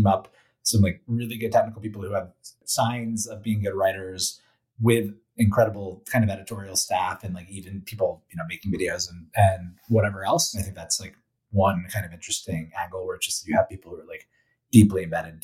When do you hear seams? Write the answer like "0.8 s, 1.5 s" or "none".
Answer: 2.6 s, 10.6 s